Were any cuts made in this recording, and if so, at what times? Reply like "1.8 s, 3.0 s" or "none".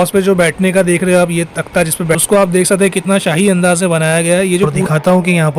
2.2 s, 4.8 s